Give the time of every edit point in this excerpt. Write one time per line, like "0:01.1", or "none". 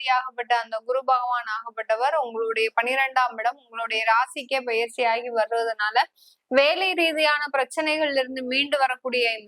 none

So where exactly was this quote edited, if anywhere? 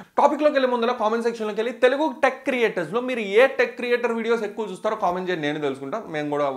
none

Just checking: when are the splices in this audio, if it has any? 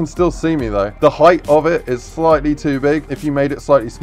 0:00.9
0:03.1

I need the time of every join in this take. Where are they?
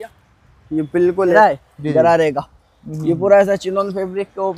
0:01.3

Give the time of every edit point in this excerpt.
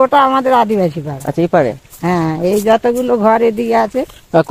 none

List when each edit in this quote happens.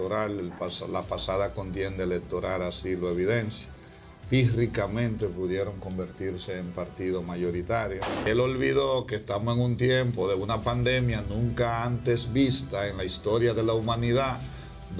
0:08.2

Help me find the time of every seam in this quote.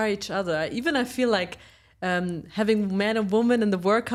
none

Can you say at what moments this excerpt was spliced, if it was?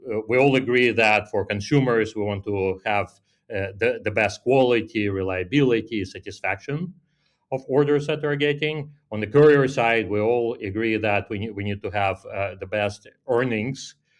none

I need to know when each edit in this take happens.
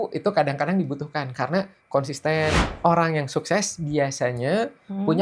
0:02.6

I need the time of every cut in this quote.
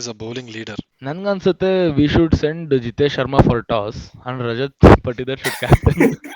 0:01.1

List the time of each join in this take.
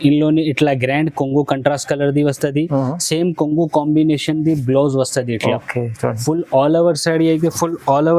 none

